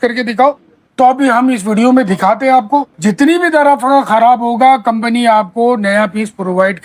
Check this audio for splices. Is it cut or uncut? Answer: cut